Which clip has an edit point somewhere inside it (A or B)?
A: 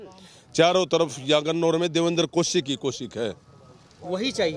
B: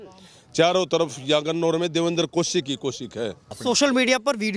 B